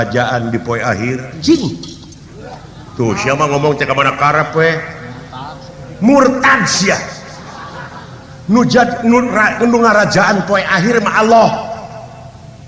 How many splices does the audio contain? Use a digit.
1